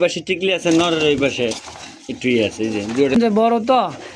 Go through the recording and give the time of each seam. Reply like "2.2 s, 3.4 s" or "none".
3.1 s

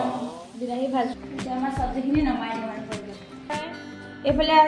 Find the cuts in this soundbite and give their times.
1.1 s, 3.5 s

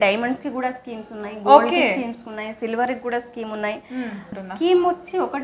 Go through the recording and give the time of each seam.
4.3 s

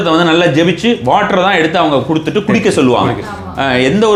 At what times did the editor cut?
none

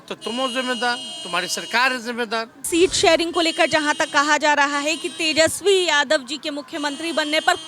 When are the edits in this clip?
2.6 s

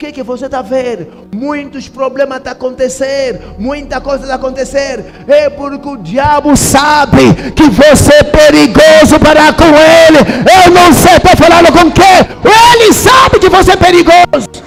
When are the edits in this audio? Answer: none

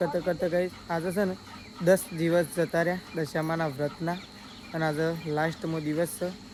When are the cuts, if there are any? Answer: none

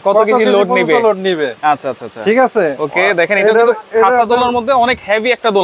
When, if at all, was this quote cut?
none

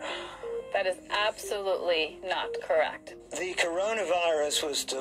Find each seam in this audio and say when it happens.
3.1 s

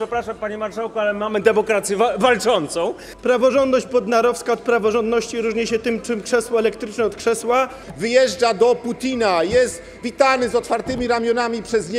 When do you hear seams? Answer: 3.1 s, 7.8 s

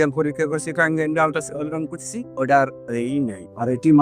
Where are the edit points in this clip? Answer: none

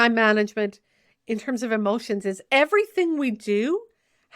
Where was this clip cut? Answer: 2.4 s

